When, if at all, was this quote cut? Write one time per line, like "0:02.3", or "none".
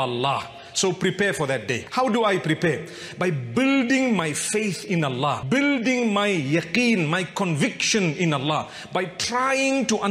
none